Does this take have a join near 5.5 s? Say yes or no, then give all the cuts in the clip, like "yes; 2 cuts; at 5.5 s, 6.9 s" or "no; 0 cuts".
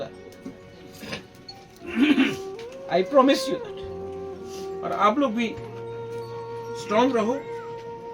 yes; 2 cuts; at 5.5 s, 6.9 s